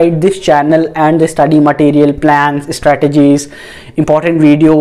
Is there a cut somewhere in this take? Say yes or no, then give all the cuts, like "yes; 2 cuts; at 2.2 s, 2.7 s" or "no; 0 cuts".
no; 0 cuts